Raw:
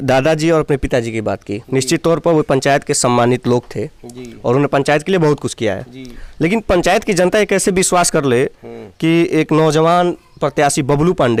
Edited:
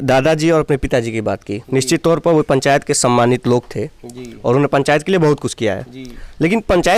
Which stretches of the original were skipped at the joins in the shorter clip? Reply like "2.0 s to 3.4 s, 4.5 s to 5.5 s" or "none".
none